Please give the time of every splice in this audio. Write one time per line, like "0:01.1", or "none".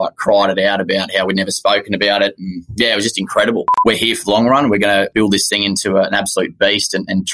0:03.7
0:05.1

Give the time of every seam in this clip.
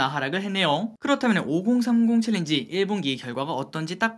0:00.9

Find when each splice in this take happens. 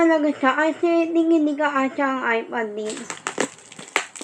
0:03.1

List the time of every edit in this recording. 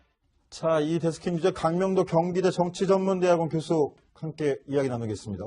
0:02.1

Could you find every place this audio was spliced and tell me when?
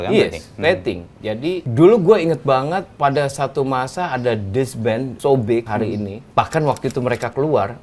0:01.7
0:02.9
0:05.1
0:05.8

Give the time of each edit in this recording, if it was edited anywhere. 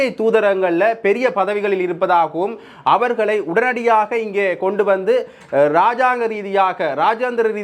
none

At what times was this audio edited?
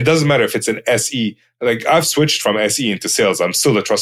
none

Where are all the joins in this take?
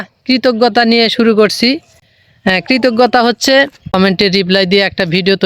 0:03.9

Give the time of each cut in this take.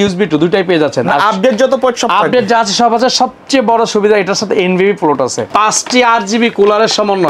0:05.5

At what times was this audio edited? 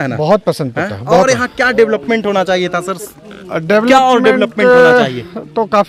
none

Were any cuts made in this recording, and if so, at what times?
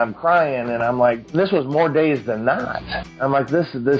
0:01.2
0:03.0

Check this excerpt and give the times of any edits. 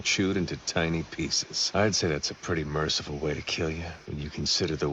0:01.4
0:04.0

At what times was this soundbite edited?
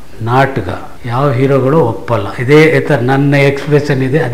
0:00.9

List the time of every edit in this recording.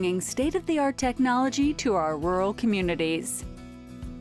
0:03.2

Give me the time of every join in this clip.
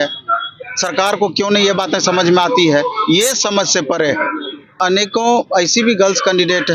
0:04.7

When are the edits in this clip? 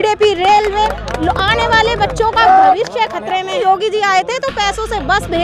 0:03.6

